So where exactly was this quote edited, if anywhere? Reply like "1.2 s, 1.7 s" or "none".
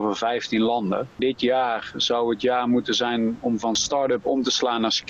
1.2 s, 3.8 s

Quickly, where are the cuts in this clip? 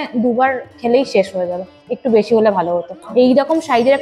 3.0 s

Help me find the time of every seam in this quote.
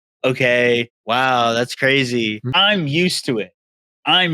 2.5 s

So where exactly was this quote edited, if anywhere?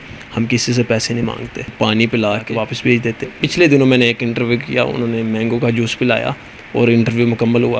1.7 s, 3.4 s

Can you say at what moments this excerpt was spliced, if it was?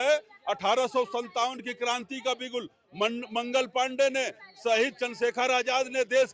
none

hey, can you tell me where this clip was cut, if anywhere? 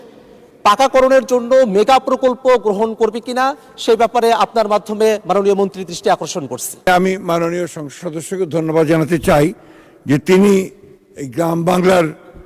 6.8 s

